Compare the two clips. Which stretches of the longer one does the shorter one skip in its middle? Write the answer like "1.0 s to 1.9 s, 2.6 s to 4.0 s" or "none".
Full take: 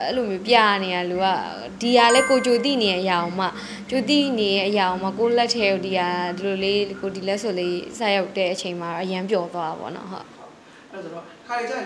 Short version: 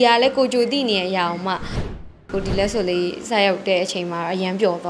4.1 s to 6.9 s